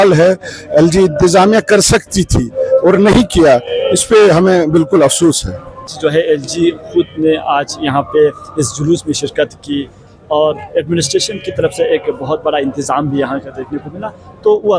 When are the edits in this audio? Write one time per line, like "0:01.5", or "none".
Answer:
none